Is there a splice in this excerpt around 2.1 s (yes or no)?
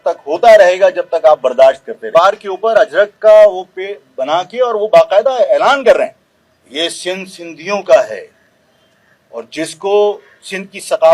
yes